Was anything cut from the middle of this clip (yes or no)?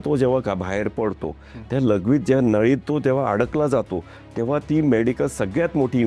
no